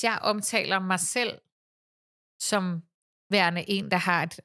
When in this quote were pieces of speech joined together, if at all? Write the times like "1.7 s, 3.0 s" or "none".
none